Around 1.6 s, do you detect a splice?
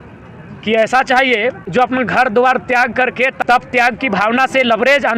yes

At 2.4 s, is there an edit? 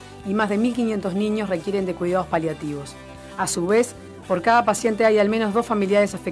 yes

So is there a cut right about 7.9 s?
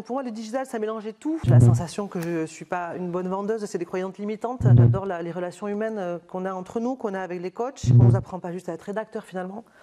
yes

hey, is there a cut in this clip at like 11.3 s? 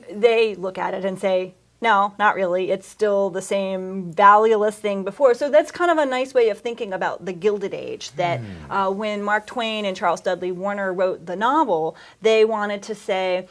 yes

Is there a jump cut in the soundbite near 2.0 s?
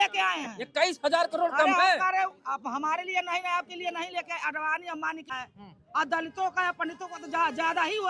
no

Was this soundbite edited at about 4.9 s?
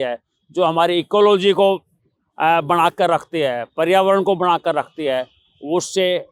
no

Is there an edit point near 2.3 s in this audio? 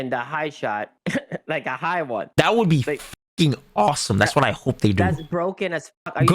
yes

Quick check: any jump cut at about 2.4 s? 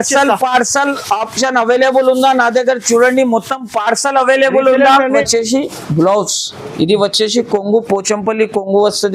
no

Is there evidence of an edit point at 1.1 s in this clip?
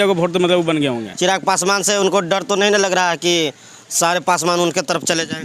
yes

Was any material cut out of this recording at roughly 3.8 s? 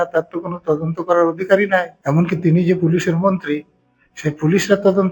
no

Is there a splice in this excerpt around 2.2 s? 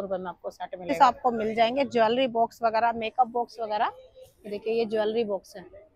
no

